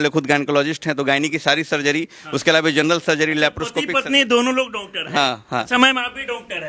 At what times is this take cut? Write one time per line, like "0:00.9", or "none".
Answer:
none